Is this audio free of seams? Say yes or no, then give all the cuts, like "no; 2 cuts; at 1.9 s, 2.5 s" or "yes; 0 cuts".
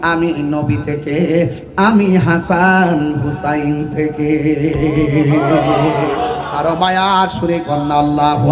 yes; 0 cuts